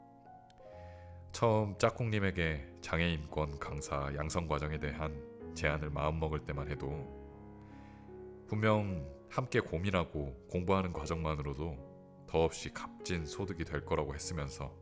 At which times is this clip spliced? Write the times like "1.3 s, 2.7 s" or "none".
1.3 s, 7.0 s, 8.5 s